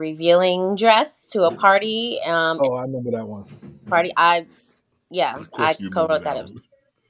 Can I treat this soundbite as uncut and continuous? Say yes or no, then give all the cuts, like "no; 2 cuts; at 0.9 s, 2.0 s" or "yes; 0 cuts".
yes; 0 cuts